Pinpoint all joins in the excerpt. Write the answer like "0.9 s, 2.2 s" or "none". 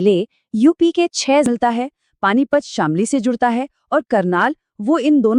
1.5 s